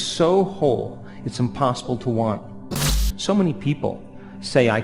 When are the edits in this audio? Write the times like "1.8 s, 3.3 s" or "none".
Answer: 3.1 s

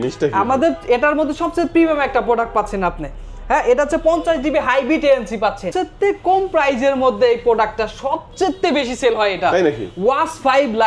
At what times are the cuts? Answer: 5.6 s

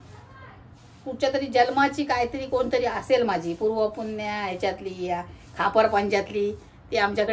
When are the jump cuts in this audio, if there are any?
none

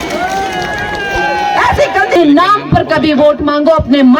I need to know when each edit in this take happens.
2.2 s

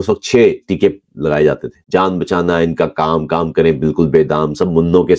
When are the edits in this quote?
1.7 s

